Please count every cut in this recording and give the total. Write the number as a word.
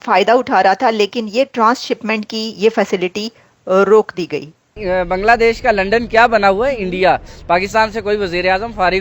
one